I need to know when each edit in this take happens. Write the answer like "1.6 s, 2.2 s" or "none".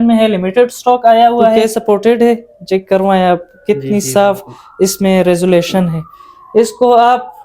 1.6 s